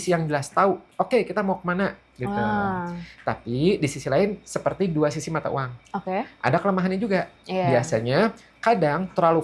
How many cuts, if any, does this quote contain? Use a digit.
0